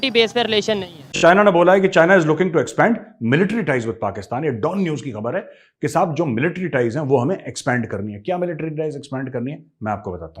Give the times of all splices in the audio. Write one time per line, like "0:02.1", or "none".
0:01.0